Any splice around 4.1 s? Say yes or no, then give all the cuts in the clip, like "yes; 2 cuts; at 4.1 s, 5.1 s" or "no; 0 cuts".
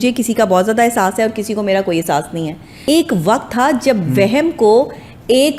no; 1 cut; at 2.7 s